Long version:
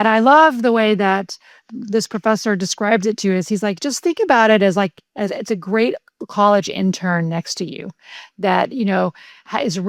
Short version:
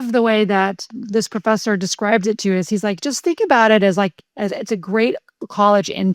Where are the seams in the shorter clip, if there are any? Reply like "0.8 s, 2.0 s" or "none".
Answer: 0.9 s